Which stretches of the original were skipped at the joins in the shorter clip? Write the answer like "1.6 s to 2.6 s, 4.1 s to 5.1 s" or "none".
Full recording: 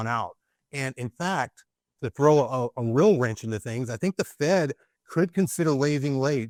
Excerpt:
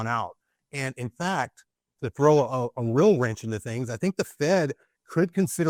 none